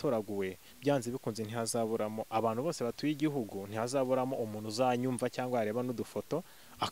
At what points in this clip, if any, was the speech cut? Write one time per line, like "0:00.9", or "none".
none